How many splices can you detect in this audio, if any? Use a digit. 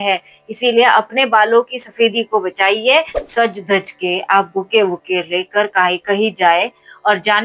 1